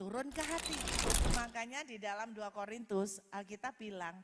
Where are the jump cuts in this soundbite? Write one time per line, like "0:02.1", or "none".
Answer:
0:01.1